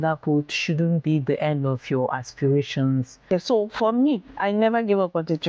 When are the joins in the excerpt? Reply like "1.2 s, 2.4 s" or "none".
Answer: 3.3 s